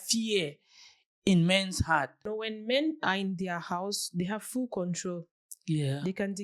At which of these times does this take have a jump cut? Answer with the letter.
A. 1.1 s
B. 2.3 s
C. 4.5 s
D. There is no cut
B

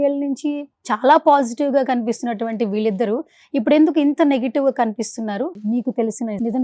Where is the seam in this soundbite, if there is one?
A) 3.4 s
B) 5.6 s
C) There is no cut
B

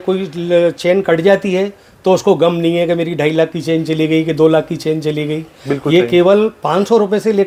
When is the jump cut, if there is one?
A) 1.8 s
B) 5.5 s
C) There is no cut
C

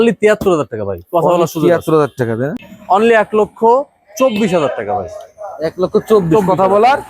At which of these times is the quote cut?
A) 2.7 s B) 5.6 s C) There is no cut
A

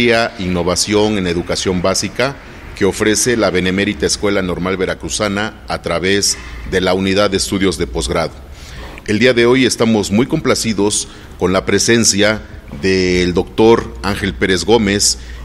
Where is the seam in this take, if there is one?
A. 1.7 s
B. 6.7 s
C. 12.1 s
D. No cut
C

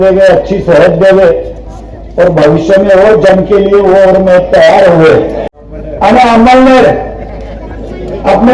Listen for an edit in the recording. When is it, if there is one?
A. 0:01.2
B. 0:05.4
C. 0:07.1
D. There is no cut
B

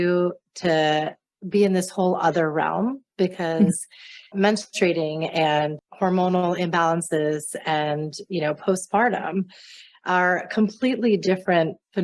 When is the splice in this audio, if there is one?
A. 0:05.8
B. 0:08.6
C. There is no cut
A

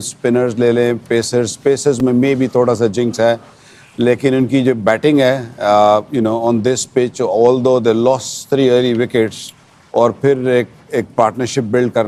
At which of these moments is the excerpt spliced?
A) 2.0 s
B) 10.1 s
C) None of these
C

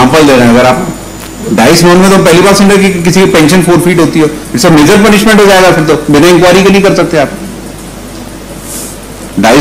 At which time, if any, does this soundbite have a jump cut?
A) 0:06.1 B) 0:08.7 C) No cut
C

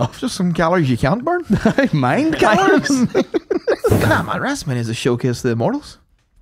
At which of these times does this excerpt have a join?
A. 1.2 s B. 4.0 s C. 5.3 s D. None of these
B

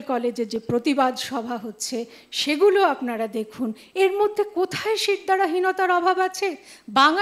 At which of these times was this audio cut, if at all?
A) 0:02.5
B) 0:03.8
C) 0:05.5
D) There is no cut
D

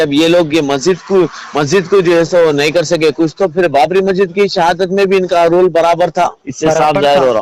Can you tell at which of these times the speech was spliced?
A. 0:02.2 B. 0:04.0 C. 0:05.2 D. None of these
D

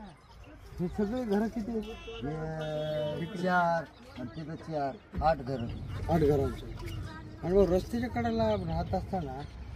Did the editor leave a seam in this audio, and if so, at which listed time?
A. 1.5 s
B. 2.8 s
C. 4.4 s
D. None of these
D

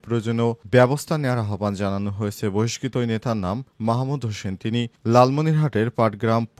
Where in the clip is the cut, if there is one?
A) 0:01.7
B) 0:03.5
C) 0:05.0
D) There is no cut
D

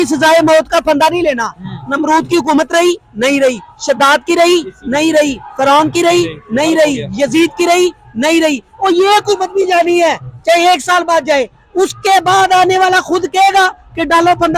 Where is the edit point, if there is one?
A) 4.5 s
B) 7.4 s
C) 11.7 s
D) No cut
D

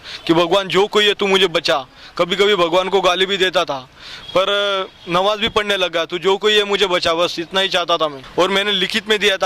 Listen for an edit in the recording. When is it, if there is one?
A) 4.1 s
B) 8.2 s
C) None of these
B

